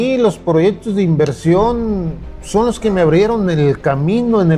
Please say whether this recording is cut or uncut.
uncut